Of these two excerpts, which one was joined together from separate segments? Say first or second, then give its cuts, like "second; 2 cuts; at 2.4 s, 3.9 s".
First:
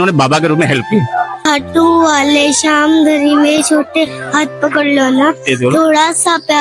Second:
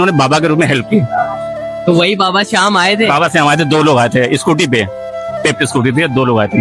first; 1 cut; at 1.4 s